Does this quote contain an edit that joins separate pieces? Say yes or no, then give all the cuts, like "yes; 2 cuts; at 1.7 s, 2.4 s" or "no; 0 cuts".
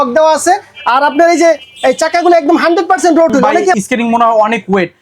yes; 1 cut; at 3.8 s